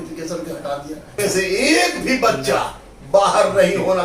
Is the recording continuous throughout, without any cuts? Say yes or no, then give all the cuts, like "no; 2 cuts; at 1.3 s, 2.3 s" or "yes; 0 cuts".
no; 1 cut; at 1.1 s